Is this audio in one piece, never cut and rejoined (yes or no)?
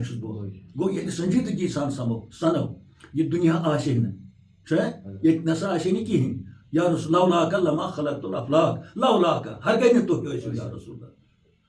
yes